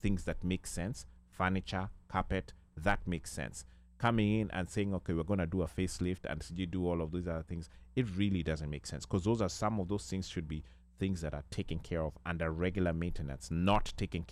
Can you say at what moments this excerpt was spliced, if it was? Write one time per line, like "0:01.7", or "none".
none